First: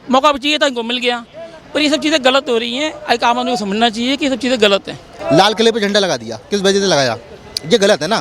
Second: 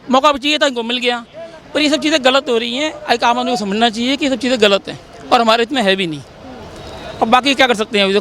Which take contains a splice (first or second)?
first